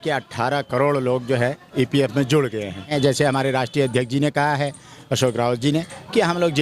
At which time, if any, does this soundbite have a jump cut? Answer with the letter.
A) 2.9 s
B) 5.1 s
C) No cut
A